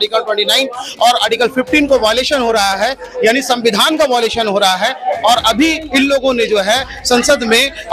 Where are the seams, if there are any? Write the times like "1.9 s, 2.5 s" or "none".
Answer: none